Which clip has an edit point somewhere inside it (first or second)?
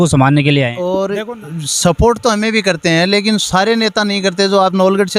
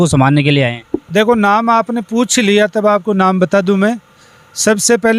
first